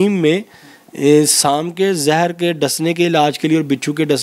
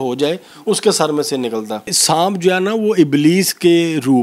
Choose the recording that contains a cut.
second; 1 cut; at 2.0 s

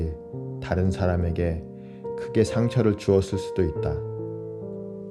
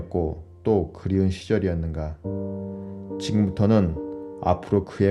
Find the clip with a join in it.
second; 2 cuts; at 2.2 s, 3.3 s

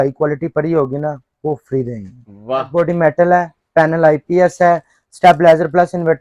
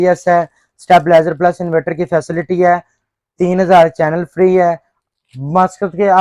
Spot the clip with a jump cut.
first; 1 cut; at 2.7 s

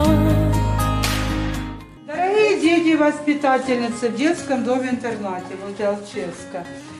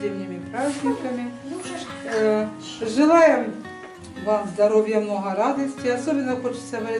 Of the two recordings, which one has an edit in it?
second; 1 cut; at 2.3 s

